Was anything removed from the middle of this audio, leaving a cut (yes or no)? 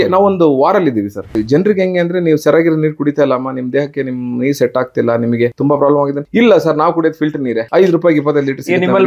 yes